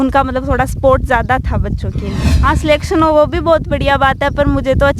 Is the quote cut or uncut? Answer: cut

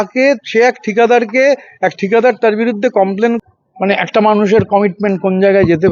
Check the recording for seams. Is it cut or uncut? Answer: cut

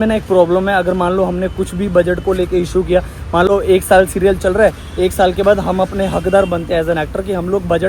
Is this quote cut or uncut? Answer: uncut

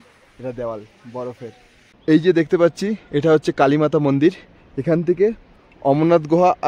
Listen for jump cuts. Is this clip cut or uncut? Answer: cut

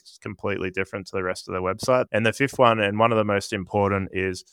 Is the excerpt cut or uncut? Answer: cut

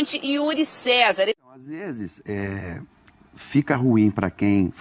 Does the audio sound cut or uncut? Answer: cut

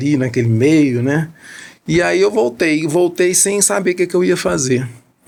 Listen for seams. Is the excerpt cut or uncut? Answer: uncut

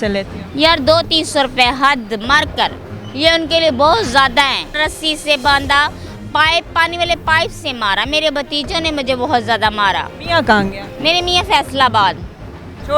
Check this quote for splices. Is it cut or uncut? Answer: cut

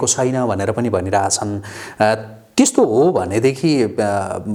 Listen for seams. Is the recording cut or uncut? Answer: uncut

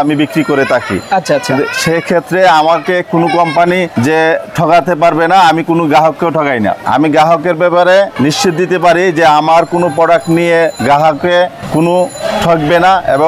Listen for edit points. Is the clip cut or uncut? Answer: cut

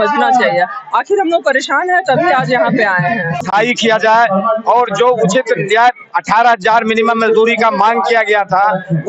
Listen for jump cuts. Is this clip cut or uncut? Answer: cut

